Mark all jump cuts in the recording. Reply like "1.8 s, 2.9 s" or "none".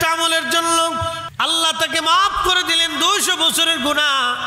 1.3 s